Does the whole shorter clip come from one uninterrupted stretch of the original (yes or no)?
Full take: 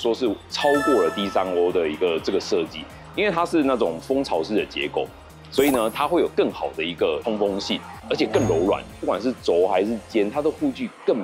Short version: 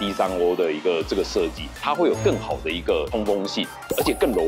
no